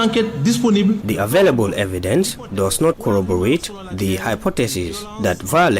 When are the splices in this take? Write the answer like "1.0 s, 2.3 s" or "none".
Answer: 1.0 s